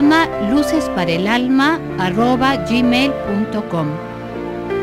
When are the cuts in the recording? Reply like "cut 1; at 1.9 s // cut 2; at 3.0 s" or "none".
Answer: none